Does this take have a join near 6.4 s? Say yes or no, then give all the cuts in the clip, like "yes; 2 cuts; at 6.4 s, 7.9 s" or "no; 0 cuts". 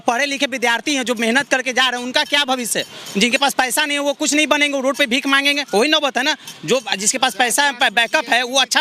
no; 0 cuts